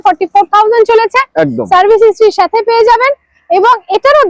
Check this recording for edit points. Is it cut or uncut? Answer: uncut